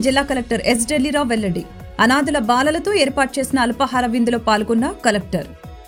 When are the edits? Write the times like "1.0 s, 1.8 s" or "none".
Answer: none